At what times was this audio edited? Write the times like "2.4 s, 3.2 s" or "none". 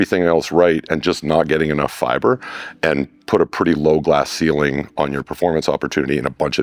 none